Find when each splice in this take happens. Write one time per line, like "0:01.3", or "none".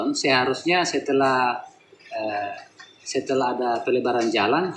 none